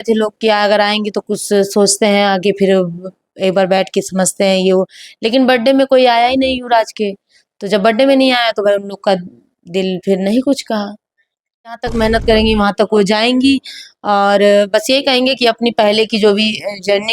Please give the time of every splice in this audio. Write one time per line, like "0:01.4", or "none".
0:11.8